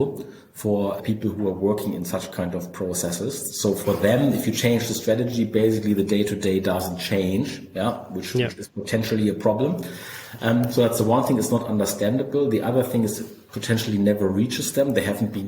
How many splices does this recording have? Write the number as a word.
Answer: one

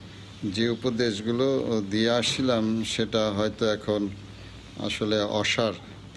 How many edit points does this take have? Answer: zero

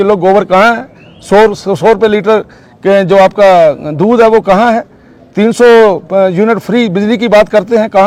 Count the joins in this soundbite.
zero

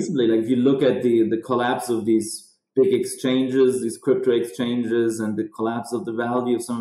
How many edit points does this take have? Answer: zero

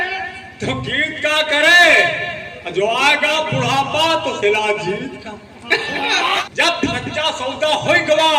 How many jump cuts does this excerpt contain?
one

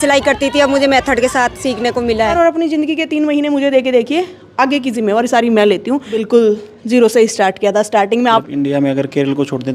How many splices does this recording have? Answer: three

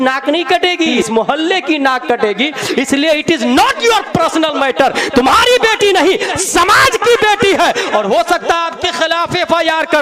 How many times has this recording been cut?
one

